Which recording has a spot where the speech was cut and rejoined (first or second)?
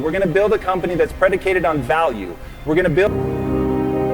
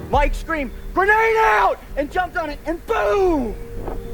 first